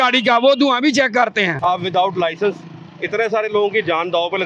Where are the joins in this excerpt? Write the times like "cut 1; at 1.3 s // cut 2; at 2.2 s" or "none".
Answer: cut 1; at 1.7 s